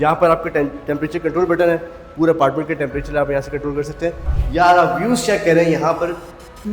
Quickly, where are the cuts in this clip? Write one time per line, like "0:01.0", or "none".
0:04.3